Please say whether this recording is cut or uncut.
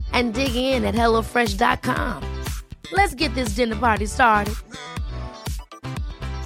uncut